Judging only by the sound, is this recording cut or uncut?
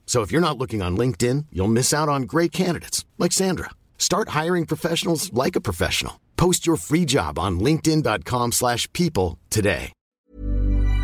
cut